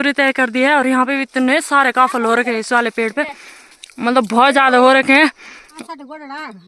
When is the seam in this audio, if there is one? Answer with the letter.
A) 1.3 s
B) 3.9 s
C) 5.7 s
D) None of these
C